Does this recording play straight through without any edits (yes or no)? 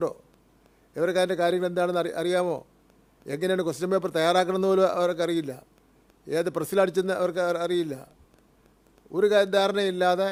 yes